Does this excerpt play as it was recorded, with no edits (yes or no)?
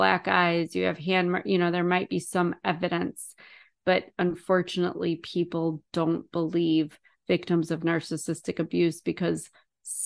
yes